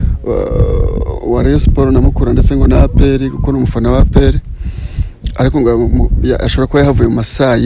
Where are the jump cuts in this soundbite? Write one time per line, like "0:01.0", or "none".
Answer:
none